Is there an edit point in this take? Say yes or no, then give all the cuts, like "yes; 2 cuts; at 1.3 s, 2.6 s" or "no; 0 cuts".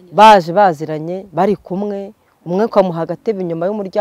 no; 0 cuts